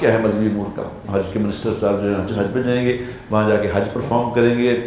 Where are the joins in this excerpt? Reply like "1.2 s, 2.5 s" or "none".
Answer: 1.0 s